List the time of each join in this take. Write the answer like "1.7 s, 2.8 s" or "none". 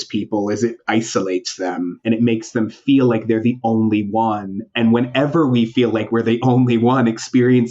2.0 s